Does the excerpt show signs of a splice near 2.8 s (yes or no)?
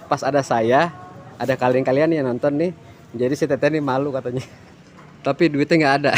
no